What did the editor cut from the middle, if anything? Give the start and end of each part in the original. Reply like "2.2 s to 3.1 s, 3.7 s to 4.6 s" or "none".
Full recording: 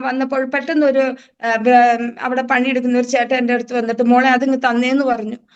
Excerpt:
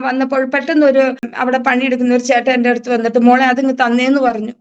1.3 s to 2.1 s